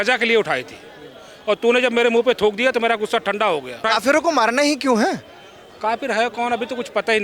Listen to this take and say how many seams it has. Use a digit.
1